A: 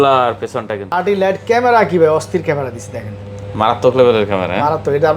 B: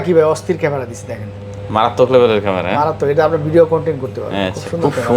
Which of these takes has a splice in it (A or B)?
A